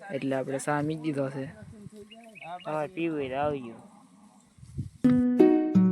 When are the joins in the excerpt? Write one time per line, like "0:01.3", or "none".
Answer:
0:04.9